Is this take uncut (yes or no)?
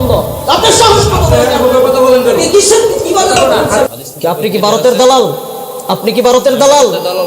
no